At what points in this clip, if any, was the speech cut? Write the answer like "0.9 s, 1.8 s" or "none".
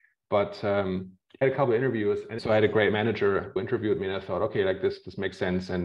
1.2 s, 2.3 s, 3.6 s